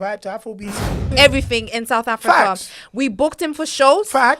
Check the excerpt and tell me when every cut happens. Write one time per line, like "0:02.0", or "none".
0:01.1